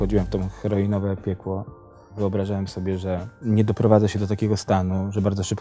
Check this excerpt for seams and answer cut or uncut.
cut